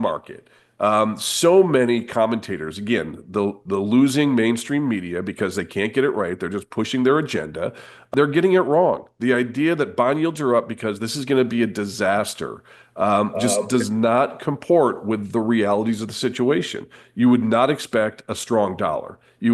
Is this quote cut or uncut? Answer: cut